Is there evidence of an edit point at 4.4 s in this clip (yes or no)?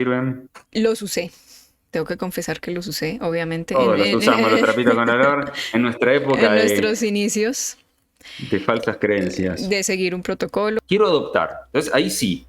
no